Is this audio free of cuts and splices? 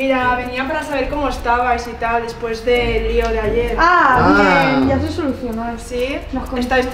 yes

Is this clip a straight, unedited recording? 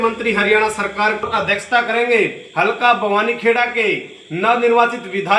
no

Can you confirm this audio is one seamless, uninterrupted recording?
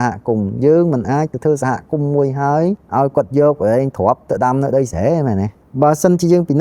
no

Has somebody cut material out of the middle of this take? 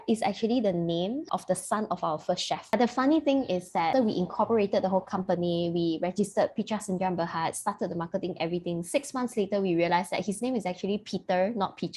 yes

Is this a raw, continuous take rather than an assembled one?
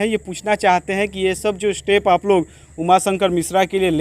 yes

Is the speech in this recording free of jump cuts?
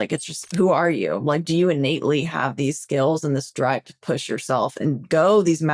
yes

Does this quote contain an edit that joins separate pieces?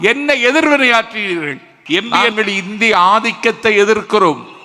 yes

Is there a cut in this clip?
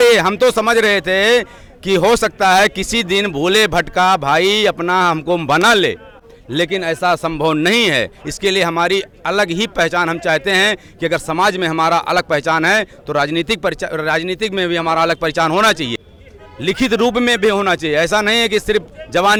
no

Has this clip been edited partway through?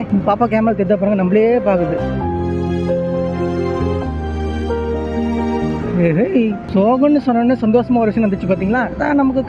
no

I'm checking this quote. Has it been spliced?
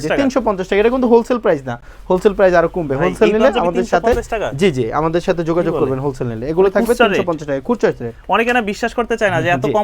no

